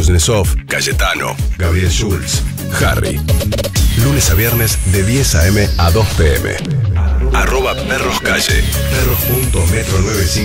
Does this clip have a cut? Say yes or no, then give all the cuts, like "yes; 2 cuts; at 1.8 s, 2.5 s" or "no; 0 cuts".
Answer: no; 0 cuts